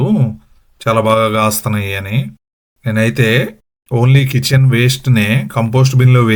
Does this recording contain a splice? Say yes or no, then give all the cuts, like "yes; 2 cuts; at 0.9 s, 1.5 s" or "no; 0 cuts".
no; 0 cuts